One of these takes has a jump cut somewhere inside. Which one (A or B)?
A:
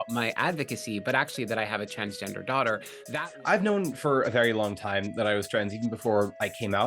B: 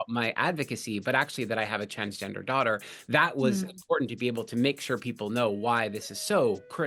A